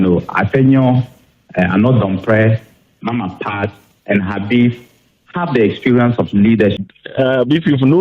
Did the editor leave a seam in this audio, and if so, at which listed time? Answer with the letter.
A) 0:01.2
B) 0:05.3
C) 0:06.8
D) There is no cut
C